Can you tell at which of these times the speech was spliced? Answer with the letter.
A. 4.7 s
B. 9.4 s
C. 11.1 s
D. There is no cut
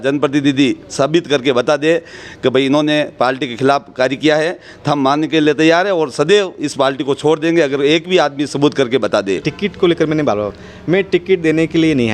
B